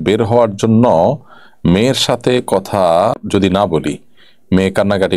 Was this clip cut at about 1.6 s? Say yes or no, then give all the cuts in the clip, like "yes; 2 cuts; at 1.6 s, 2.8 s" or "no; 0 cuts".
no; 1 cut; at 3.1 s